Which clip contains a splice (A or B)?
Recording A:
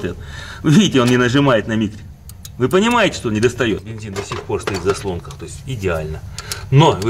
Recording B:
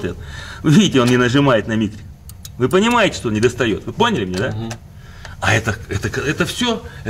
A